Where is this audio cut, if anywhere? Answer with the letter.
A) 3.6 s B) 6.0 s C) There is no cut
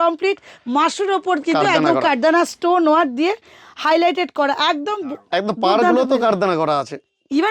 C